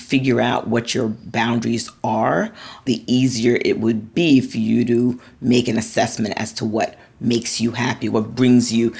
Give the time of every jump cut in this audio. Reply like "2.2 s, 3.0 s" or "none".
2.9 s, 4.1 s, 8.1 s